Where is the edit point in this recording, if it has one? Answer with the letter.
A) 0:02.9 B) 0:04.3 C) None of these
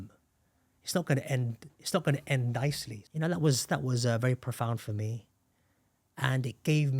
A